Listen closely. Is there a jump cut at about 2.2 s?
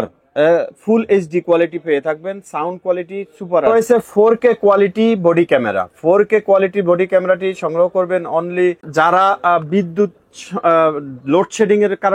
no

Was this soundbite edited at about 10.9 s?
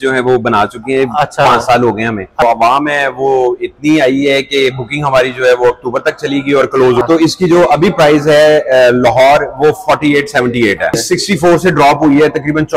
yes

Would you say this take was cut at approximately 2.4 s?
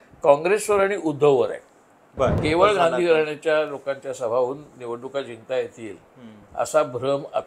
yes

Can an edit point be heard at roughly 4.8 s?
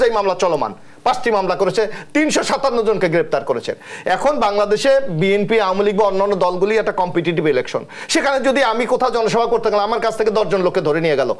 no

